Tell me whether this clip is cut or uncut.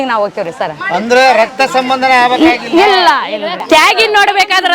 cut